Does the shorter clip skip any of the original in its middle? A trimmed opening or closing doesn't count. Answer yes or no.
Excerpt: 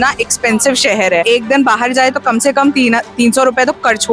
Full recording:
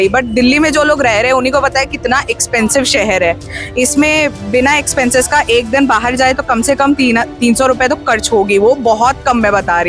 yes